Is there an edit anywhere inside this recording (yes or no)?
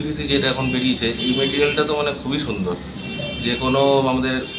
no